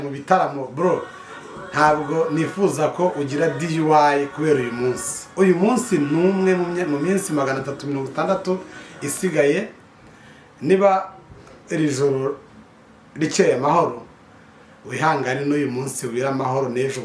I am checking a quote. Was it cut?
no; 0 cuts

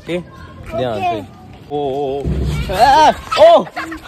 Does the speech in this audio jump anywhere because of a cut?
yes; 1 cut; at 1.7 s

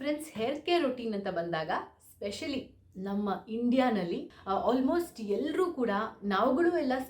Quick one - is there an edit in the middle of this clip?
yes; 1 cut; at 4.3 s

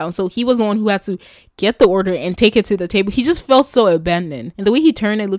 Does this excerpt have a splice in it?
yes; 1 cut; at 4.4 s

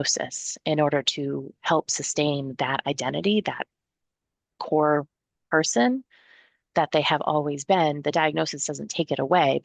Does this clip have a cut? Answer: no; 0 cuts

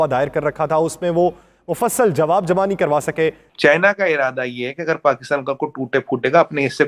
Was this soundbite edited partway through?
yes; 1 cut; at 3.4 s

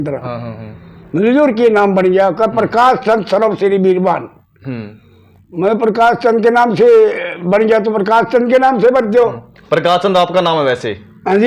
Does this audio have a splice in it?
no; 0 cuts

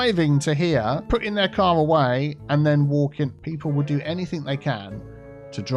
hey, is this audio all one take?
no; 2 cuts; at 1.0 s, 3.4 s

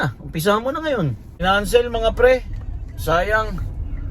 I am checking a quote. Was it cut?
yes; 1 cut; at 1.2 s

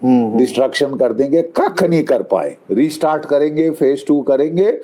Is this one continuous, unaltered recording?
no; 1 cut; at 2.6 s

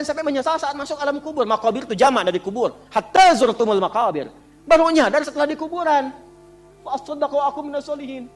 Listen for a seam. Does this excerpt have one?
no; 0 cuts

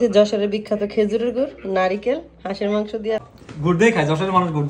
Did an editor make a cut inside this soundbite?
yes; 1 cut; at 3.3 s

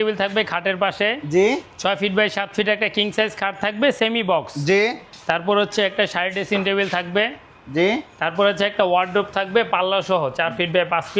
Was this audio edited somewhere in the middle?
no; 0 cuts

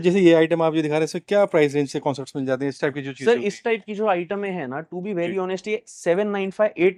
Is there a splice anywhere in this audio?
no; 0 cuts

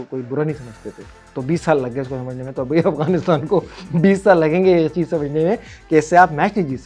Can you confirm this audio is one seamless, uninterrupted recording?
yes; 0 cuts

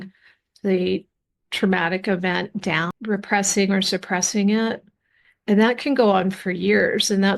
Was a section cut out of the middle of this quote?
no; 0 cuts

